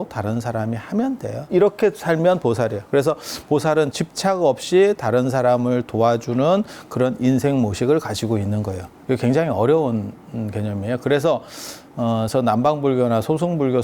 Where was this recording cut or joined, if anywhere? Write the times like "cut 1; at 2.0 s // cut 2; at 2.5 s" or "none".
cut 1; at 1.5 s // cut 2; at 3.9 s